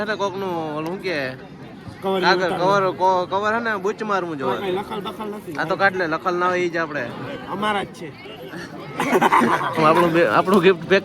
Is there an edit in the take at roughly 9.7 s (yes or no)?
yes